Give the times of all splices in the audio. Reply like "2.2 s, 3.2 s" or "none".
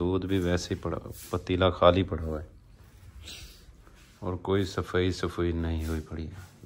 none